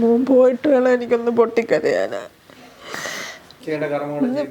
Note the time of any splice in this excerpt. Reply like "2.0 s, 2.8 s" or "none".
3.4 s